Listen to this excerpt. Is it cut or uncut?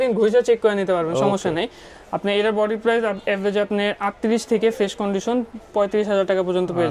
uncut